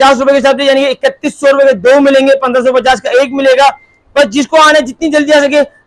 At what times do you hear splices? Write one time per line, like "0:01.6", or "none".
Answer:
none